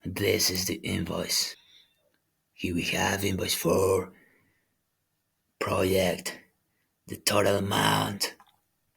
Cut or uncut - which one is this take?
cut